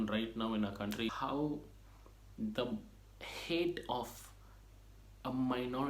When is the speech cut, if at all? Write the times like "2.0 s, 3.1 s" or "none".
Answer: 1.1 s